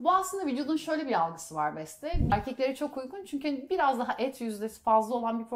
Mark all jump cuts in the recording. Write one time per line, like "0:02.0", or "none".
0:02.3